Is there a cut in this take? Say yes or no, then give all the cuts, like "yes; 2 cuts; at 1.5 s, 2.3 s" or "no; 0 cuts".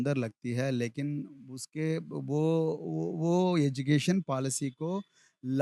no; 0 cuts